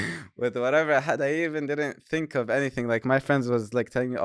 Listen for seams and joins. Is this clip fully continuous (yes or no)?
yes